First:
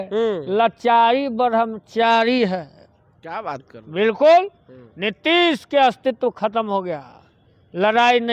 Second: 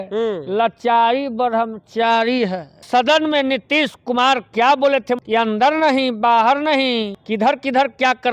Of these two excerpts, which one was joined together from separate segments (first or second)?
second